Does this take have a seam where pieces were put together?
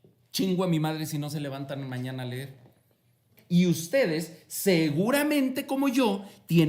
yes; 1 cut; at 3.3 s

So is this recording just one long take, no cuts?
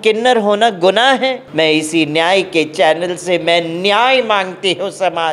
no; 1 cut; at 1.4 s

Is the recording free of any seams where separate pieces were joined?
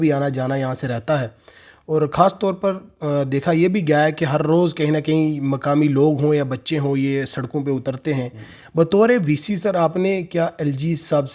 yes; 0 cuts

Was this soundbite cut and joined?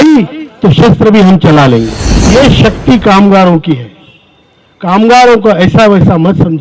yes; 1 cut; at 2.3 s

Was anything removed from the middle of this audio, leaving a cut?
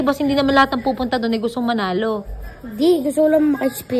no; 0 cuts

